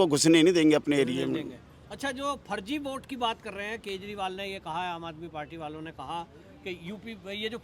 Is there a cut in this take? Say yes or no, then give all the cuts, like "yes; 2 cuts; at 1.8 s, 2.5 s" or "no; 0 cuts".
no; 0 cuts